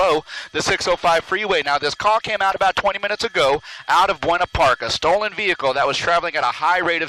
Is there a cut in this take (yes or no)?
no